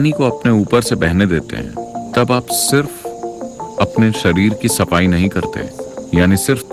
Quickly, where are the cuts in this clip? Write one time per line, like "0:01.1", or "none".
none

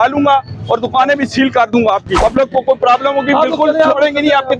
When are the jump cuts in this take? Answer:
0:02.1

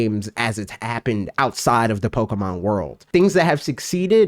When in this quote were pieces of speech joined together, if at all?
0:03.0

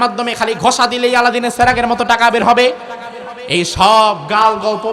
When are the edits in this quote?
none

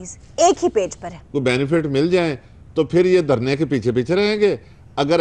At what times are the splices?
0:01.1

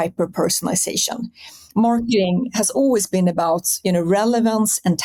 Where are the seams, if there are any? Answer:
none

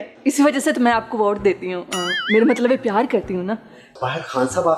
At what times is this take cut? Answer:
0:03.8

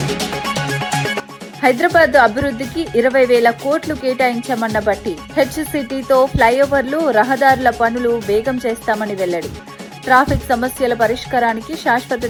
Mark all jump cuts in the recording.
none

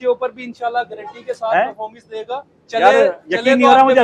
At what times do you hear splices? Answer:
none

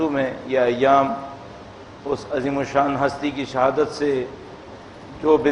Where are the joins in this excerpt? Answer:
0:02.7

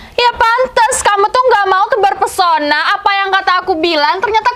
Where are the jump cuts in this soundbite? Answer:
none

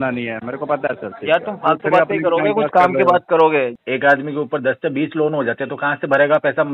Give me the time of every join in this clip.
0:03.7

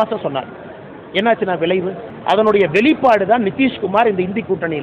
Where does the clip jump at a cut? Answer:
0:02.1

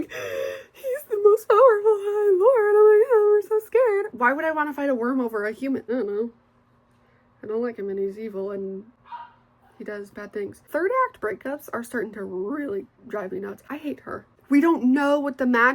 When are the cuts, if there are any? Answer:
0:04.1
0:05.8
0:10.6
0:13.9

